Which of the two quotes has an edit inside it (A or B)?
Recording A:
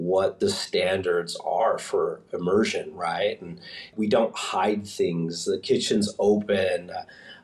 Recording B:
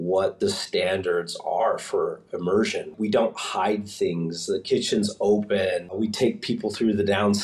B